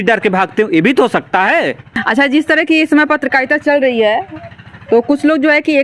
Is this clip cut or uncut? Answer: cut